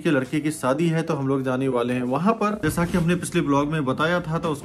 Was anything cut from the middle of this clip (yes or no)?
no